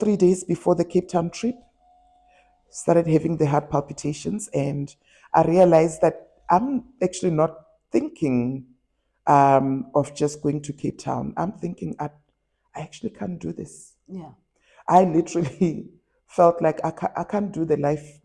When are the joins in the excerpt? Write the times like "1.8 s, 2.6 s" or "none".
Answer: none